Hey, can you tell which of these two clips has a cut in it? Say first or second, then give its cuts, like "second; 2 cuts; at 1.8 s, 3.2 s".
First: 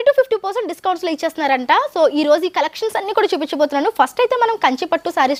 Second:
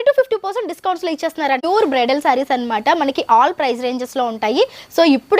second; 1 cut; at 1.6 s